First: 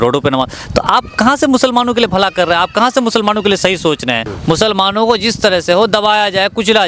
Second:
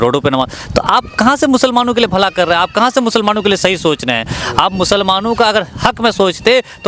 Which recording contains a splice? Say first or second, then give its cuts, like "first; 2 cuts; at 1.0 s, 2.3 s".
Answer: first; 1 cut; at 4.3 s